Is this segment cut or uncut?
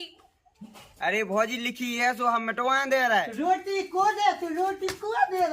cut